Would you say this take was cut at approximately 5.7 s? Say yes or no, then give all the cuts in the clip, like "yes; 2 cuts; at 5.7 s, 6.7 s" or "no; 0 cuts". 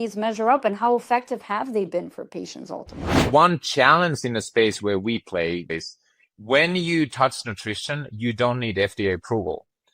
yes; 2 cuts; at 3.3 s, 5.7 s